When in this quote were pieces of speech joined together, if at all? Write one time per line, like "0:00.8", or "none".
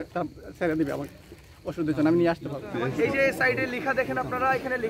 0:02.7